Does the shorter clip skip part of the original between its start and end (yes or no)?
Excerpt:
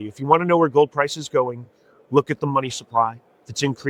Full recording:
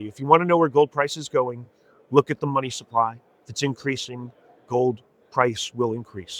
no